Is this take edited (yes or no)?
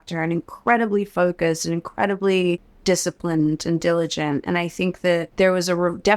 yes